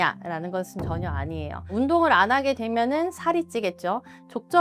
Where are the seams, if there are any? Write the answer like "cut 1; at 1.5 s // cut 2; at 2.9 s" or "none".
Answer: none

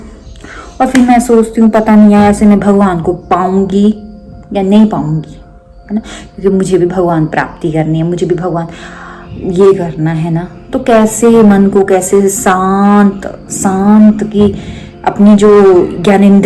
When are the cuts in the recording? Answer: none

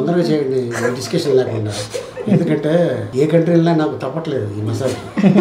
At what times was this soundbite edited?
cut 1; at 3.0 s

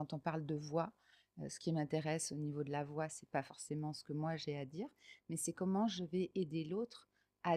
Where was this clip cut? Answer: none

